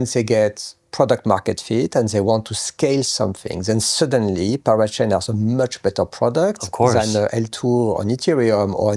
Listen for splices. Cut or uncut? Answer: uncut